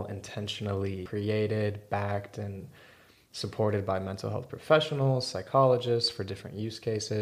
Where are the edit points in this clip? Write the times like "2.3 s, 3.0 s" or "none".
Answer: 1.0 s